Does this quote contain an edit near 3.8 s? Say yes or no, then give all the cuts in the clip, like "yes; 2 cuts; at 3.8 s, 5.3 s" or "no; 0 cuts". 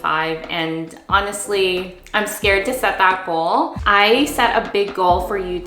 yes; 1 cut; at 3.8 s